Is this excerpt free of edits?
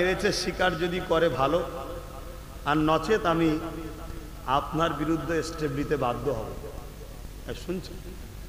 yes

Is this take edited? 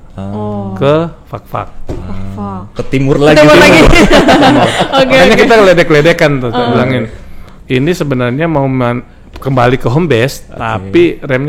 no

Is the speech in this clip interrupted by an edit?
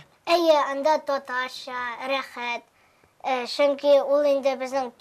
no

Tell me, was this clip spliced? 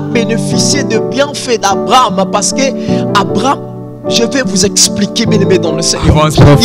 no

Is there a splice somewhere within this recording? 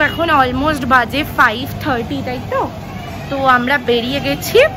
no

